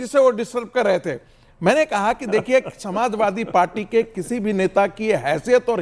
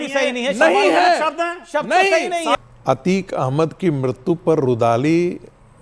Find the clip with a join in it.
second; 1 cut; at 2.5 s

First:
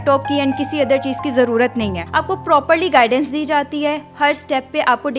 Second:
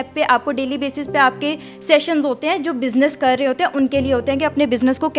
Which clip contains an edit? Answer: first; 1 cut; at 2.0 s

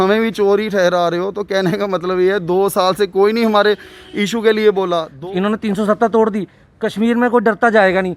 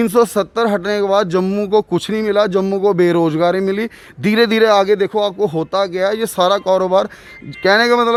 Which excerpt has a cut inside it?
first; 1 cut; at 5.1 s

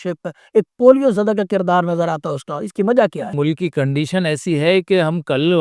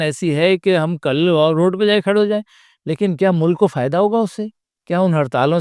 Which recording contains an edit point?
first; 1 cut; at 3.3 s

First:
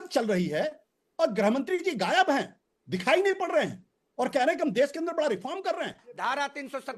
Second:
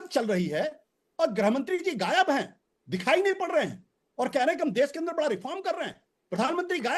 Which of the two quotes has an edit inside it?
first; 1 cut; at 6.0 s

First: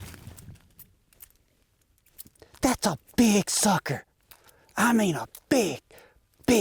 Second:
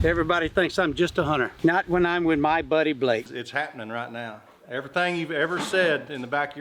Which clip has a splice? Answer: second; 1 cut; at 3.3 s

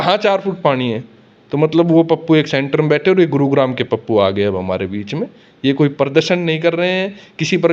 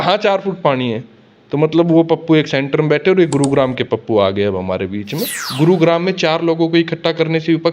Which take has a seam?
second; 1 cut; at 5.4 s

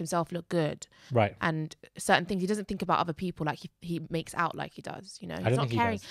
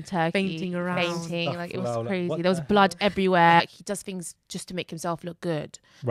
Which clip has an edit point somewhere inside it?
second; 1 cut; at 3.6 s

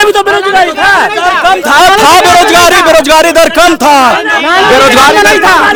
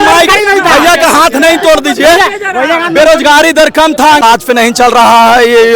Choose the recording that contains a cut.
second; 1 cut; at 4.2 s

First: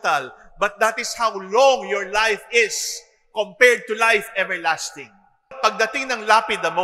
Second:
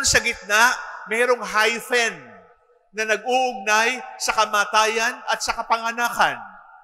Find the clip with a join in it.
first; 1 cut; at 5.5 s

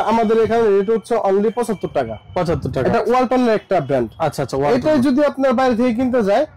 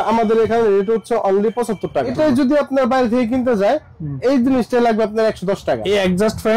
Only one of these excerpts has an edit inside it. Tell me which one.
second; 2 cuts; at 2.1 s, 5.8 s

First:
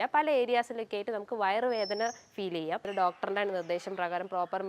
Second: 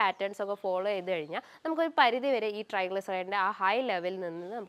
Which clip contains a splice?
first; 1 cut; at 2.9 s

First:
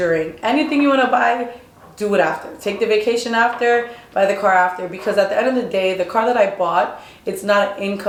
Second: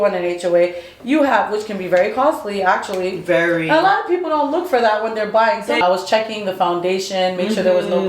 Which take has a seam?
second; 1 cut; at 5.8 s

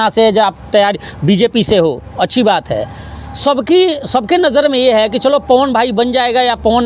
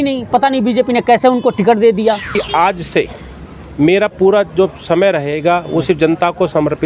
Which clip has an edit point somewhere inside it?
second; 1 cut; at 2.3 s

